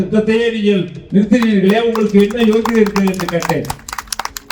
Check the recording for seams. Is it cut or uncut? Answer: uncut